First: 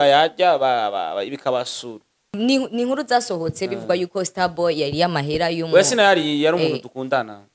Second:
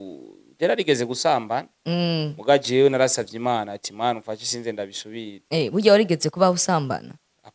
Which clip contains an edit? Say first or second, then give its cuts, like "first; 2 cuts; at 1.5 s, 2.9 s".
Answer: first; 1 cut; at 2.3 s